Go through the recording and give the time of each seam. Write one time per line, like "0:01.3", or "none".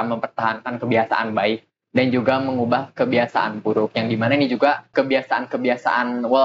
0:04.9